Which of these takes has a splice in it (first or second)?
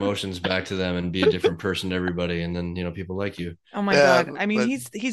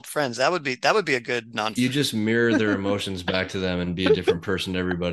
second